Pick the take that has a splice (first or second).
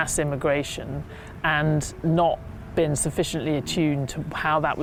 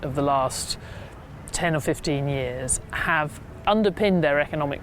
second